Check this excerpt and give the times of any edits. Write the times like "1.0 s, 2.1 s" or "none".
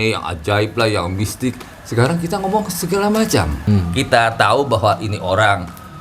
3.6 s